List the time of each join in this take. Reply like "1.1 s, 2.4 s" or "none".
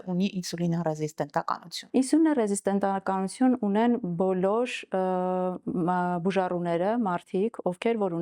1.7 s

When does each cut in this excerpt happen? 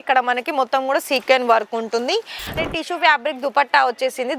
2.5 s

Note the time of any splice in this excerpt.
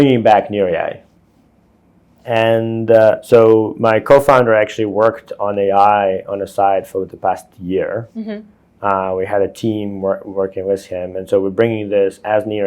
2.2 s

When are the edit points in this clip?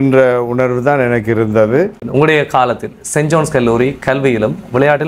2.1 s

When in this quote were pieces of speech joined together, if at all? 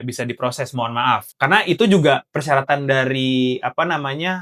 1.3 s

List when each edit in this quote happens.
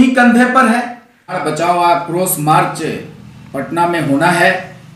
1.4 s

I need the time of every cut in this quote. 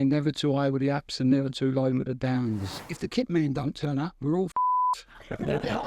2.9 s

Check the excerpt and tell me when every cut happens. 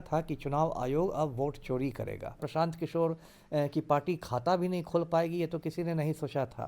2.5 s

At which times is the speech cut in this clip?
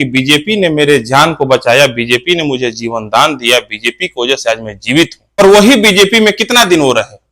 5.4 s

